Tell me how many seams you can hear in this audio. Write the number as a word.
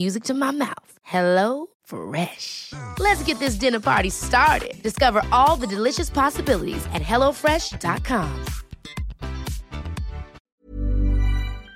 one